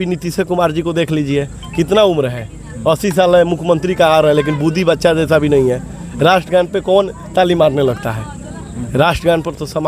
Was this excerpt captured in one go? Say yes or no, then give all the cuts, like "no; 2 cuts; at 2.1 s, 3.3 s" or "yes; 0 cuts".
yes; 0 cuts